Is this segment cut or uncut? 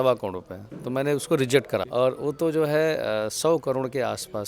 cut